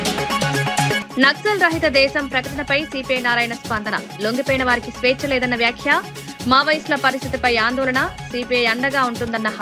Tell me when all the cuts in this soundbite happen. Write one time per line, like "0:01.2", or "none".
none